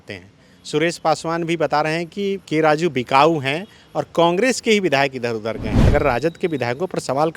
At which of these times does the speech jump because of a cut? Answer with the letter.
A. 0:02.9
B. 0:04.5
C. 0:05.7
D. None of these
C